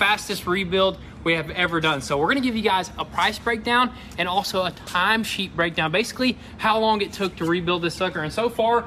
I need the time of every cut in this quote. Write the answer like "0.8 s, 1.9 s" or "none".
none